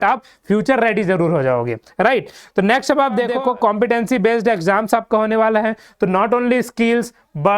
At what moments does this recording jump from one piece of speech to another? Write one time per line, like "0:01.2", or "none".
0:03.3